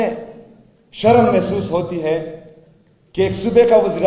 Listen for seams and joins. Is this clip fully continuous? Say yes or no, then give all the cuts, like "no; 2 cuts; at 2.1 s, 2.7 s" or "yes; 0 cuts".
yes; 0 cuts